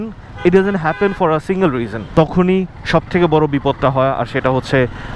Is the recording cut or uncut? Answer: cut